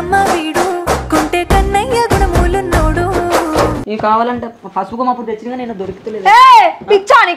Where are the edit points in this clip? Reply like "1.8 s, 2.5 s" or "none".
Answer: 3.8 s